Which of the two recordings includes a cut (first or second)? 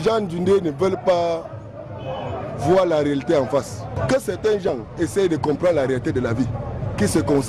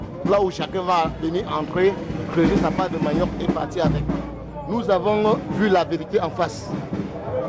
first